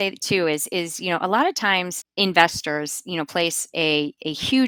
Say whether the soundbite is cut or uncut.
uncut